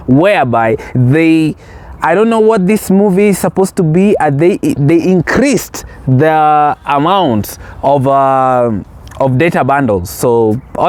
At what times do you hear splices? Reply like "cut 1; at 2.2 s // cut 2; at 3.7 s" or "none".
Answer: none